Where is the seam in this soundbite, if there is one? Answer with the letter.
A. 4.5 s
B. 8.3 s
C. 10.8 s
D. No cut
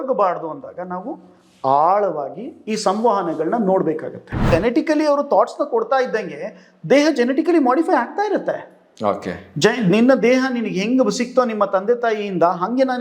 A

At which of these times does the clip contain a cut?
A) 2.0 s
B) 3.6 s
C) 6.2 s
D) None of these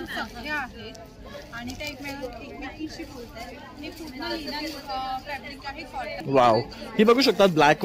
C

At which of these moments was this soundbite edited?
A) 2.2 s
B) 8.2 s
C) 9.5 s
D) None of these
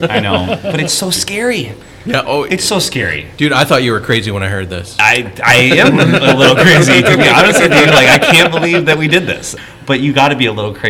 C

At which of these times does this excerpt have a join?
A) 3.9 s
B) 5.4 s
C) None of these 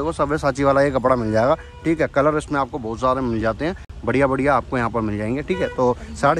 C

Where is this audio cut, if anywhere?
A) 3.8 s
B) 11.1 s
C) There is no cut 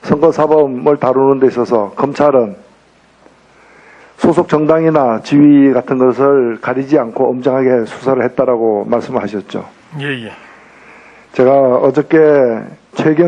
A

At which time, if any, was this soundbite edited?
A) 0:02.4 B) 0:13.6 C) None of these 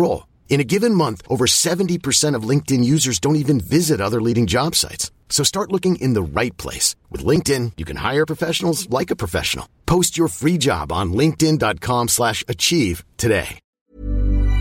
B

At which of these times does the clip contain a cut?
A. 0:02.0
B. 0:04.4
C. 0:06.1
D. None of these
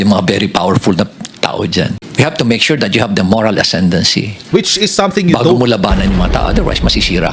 A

